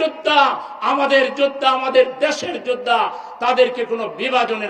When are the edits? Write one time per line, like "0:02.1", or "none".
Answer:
none